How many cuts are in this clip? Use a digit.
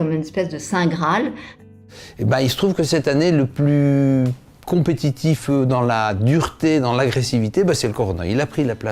1